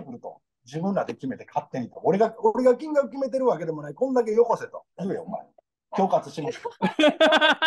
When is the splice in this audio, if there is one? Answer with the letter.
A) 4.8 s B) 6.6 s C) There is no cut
A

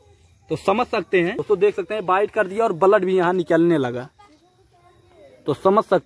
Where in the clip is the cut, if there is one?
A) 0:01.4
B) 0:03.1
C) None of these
A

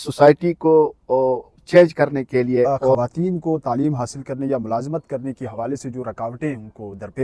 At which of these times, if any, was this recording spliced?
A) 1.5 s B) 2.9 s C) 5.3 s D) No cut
B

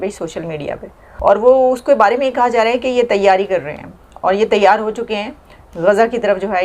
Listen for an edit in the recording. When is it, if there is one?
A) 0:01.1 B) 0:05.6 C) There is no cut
A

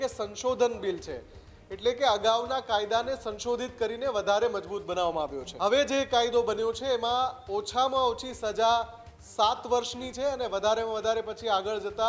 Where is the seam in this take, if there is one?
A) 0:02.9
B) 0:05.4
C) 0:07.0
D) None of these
B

